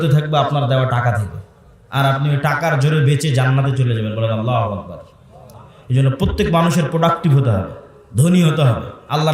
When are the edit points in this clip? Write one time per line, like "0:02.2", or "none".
none